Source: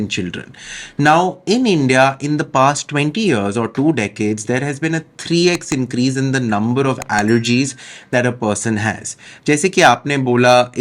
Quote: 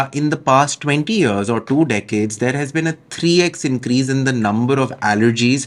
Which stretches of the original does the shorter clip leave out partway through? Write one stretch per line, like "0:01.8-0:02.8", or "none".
none